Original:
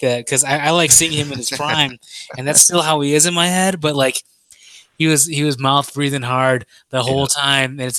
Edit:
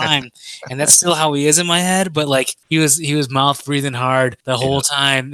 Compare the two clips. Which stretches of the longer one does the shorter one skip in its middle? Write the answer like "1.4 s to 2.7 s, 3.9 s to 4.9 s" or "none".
4.2 s to 4.9 s, 6.7 s to 6.8 s